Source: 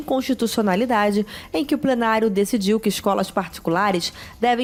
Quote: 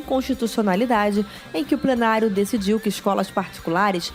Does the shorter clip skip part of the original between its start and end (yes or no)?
no